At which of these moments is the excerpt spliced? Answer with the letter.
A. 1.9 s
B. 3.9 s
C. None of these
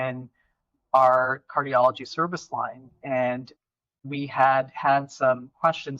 B